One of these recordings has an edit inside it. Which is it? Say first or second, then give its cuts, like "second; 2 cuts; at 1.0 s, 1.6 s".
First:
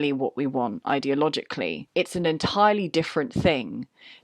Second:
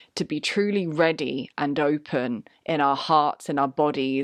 first; 1 cut; at 1.8 s